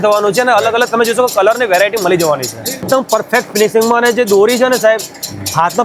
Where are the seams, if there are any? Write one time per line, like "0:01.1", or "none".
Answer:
0:03.1